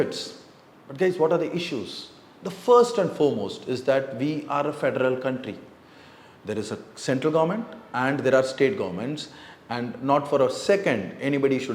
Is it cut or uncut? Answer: uncut